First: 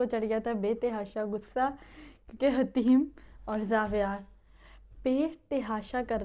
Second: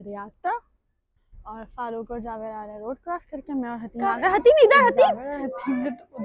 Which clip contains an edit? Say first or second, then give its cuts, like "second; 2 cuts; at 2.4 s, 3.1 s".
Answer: second; 1 cut; at 5.3 s